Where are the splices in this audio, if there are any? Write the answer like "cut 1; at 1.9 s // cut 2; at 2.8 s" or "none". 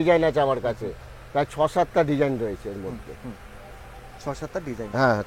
none

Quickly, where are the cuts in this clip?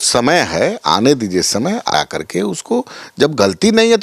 cut 1; at 1.9 s

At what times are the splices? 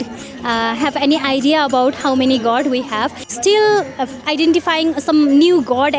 cut 1; at 3.3 s

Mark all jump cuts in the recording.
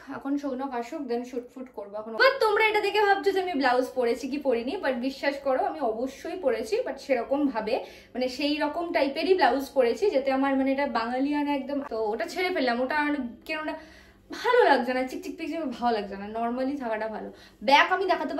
cut 1; at 2.2 s // cut 2; at 11.9 s

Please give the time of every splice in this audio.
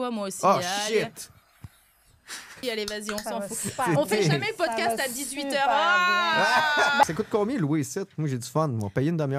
cut 1; at 2.6 s // cut 2; at 7.0 s

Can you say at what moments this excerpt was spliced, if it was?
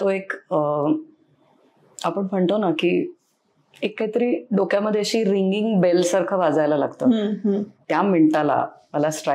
cut 1; at 7.7 s

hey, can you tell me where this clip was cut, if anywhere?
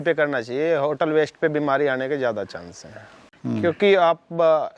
cut 1; at 2.9 s

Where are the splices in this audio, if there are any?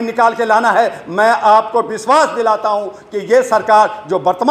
none

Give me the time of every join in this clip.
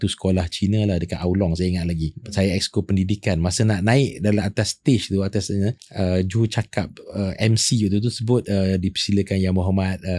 cut 1; at 2.2 s // cut 2; at 5.8 s

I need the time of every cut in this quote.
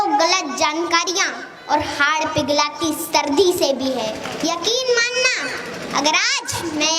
cut 1; at 4.3 s

